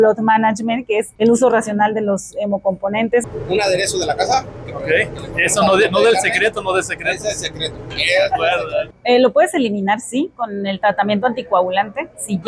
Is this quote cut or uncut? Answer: cut